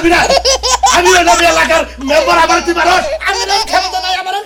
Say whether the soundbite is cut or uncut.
uncut